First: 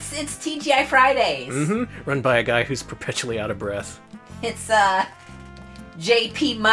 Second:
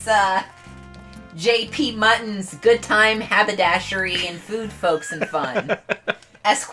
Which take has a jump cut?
first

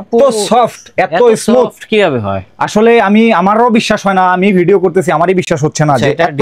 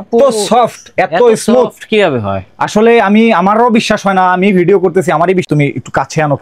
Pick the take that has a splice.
second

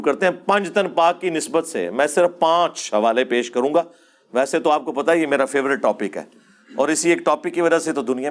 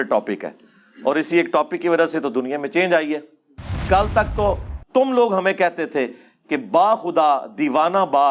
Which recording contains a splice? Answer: second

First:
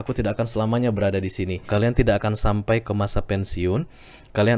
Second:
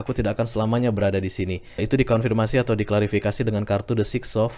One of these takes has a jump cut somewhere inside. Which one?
first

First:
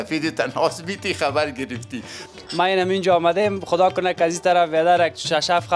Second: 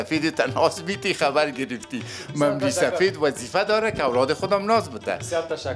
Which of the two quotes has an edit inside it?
first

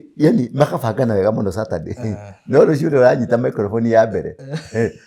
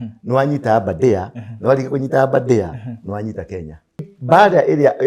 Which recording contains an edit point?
second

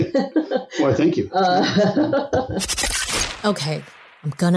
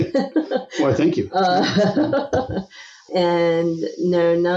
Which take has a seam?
first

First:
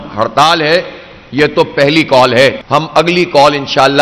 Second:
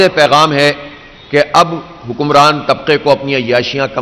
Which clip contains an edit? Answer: first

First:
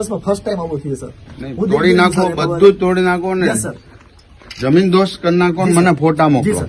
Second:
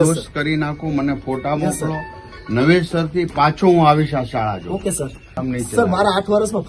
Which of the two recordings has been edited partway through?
second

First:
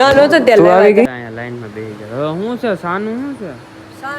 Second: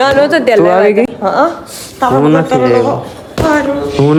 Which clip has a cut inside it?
first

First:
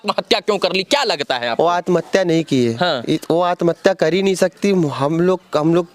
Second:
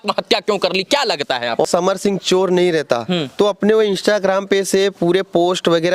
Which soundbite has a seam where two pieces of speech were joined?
second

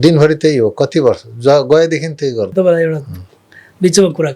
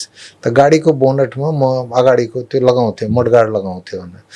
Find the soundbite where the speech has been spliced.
first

